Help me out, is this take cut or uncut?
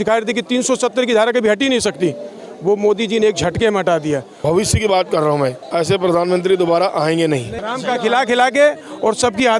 cut